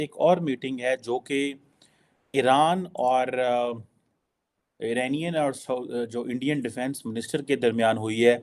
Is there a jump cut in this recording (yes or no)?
no